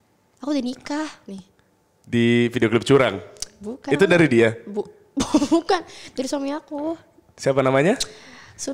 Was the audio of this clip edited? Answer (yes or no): no